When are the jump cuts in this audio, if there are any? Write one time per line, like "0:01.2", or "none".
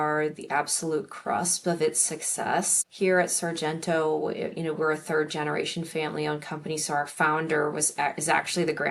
0:02.8